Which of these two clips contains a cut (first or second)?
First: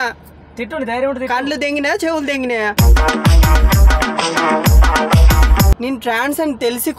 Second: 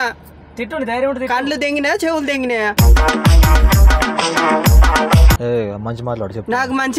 first